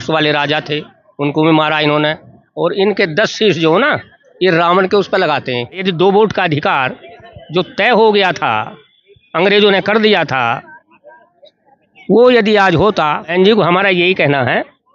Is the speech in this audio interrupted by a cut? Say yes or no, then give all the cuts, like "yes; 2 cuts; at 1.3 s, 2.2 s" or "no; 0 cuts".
yes; 2 cuts; at 5.8 s, 13.3 s